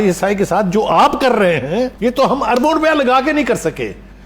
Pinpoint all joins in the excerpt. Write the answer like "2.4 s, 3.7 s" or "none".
1.9 s